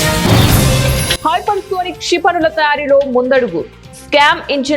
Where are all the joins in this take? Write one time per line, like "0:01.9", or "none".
0:01.1